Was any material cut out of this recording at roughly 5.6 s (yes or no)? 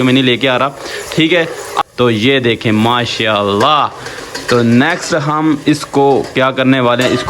no